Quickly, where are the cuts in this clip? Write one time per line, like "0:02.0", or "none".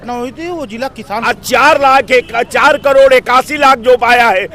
0:01.0